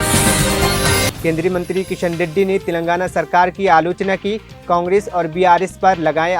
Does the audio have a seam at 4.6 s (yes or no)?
no